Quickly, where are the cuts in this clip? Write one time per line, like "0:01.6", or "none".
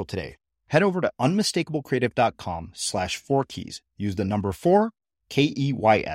none